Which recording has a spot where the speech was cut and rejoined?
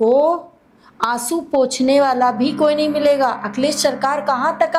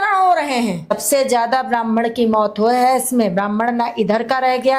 second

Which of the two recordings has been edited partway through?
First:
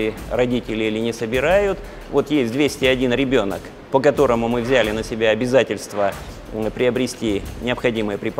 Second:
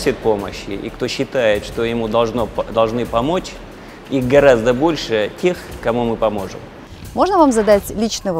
second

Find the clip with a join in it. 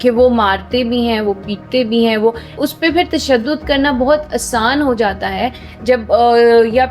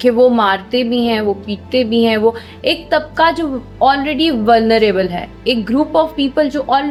first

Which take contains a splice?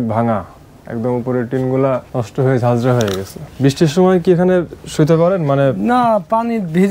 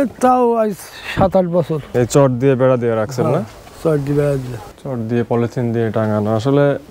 second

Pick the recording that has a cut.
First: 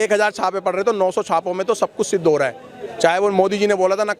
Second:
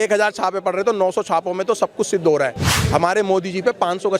second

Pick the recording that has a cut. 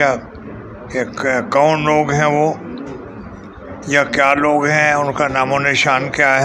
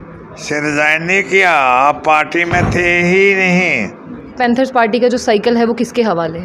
second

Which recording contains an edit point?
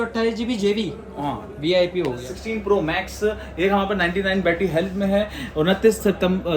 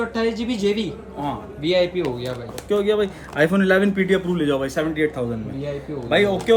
first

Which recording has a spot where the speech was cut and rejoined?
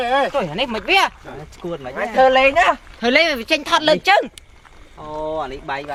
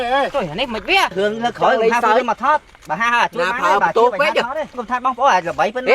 second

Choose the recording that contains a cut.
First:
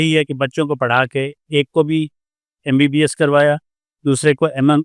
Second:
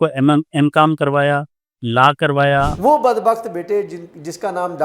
second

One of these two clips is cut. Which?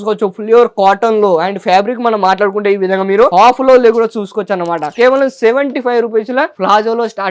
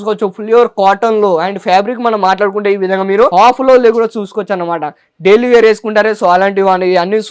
first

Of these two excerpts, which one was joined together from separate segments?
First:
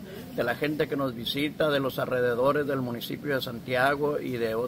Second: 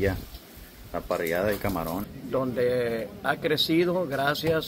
second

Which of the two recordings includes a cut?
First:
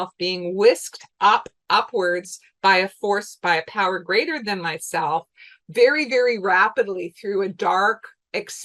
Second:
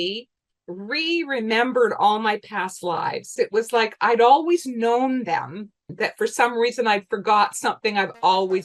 second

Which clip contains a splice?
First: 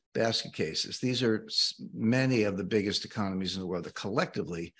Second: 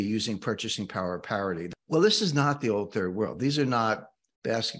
second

